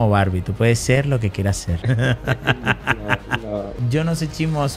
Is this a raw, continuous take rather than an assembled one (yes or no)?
no